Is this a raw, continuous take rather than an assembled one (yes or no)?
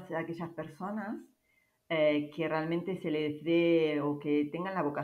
yes